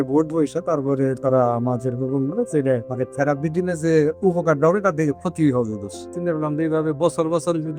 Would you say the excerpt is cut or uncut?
cut